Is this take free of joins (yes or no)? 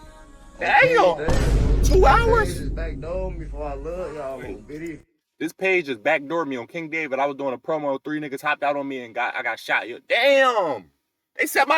yes